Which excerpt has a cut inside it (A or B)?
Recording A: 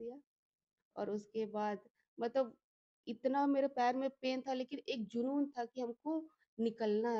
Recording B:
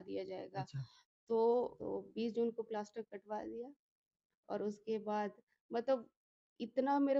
B